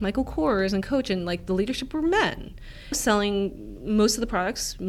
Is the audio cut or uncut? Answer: uncut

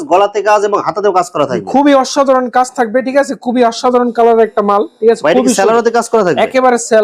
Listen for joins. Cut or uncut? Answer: uncut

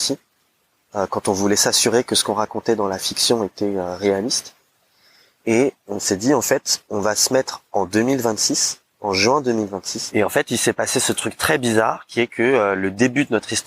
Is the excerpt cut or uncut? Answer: cut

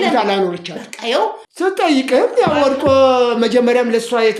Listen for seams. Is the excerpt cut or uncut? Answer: cut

